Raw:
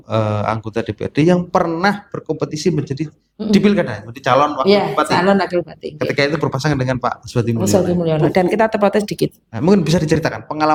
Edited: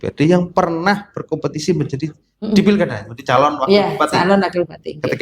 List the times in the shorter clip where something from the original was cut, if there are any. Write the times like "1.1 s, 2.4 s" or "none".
none